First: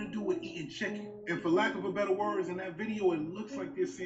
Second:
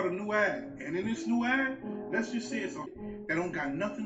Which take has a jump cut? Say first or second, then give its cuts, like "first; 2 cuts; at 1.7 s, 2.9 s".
second; 1 cut; at 2.9 s